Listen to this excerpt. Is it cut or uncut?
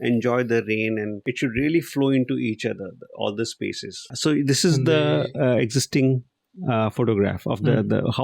cut